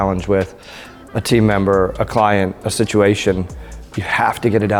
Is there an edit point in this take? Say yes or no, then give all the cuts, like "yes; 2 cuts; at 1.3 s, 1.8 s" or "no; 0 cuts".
no; 0 cuts